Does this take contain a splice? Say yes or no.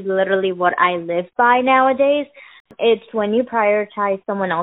yes